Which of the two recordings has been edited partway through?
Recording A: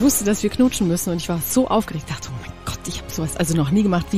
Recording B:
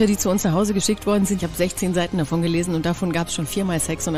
B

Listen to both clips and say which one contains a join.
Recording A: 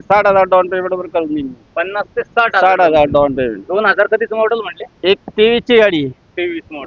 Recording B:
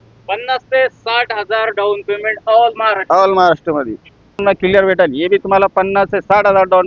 B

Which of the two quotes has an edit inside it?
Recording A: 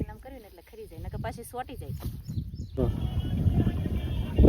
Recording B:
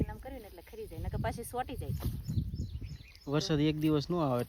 A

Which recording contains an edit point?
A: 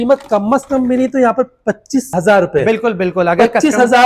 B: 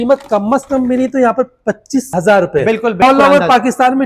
B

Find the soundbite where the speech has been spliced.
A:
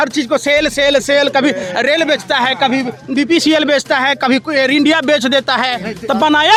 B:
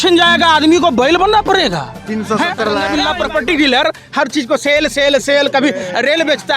B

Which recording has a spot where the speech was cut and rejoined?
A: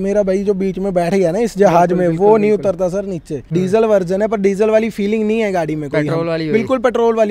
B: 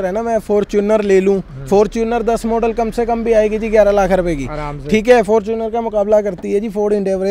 A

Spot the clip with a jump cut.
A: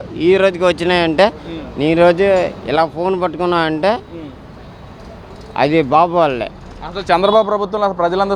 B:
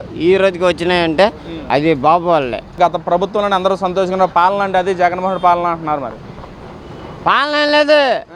B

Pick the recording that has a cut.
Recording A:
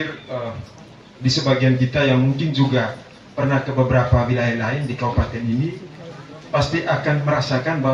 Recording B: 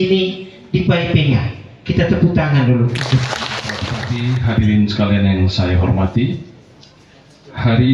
B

